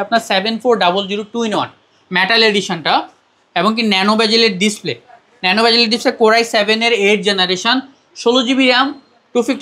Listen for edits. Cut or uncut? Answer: uncut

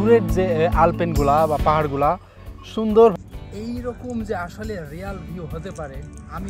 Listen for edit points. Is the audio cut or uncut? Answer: cut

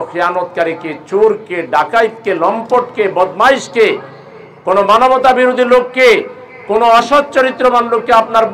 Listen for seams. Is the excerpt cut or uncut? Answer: uncut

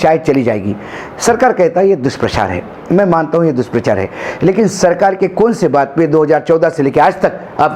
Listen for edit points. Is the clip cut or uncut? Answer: uncut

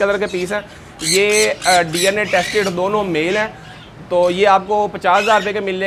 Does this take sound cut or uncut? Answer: uncut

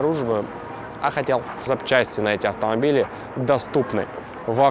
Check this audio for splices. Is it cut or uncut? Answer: cut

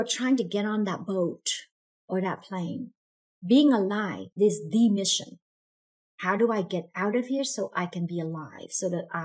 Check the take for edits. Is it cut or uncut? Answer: cut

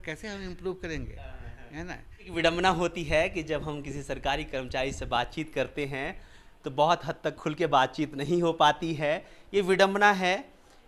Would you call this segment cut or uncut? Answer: cut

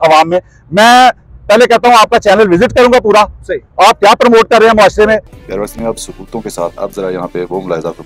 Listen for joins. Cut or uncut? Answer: cut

